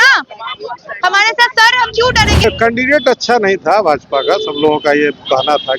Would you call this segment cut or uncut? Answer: cut